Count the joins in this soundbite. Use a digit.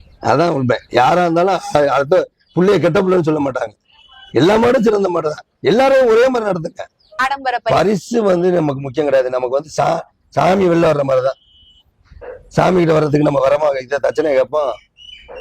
1